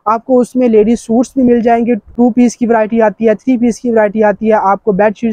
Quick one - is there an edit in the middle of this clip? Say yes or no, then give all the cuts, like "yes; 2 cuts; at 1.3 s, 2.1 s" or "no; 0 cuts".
yes; 1 cut; at 2.1 s